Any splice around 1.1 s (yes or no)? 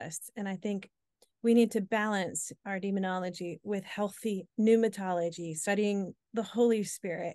no